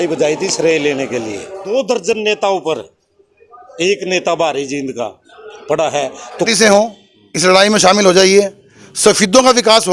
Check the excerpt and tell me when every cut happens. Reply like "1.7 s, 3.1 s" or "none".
1.7 s, 6.5 s